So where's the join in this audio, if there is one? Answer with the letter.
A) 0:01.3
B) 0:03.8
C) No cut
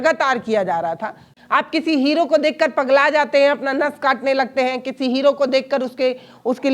A